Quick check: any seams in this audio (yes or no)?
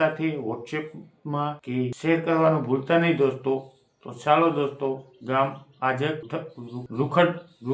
no